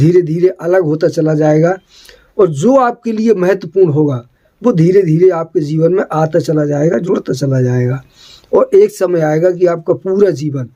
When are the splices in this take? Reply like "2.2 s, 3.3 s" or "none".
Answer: none

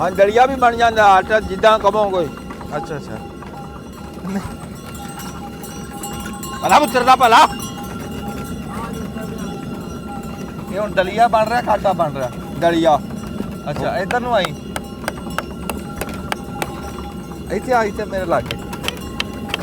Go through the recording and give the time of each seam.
none

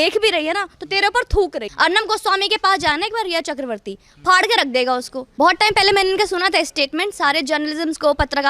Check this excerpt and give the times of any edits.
1.6 s, 5.2 s

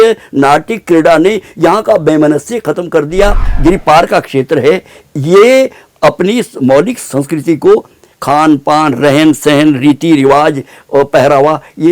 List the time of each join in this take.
3.5 s

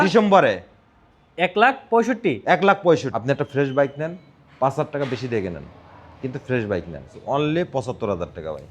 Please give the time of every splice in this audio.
3.1 s, 7.4 s

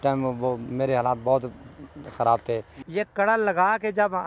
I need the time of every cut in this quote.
2.8 s

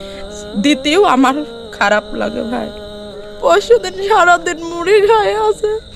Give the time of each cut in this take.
3.3 s

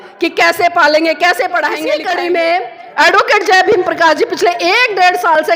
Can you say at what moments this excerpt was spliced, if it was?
1.9 s

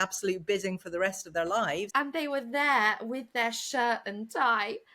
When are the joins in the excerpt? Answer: 1.9 s

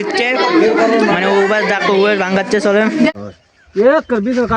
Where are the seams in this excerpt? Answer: 3.2 s

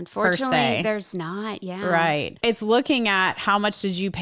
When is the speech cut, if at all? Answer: 2.4 s

